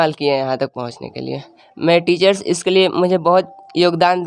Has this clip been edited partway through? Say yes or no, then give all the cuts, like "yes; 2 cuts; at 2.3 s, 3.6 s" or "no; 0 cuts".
no; 0 cuts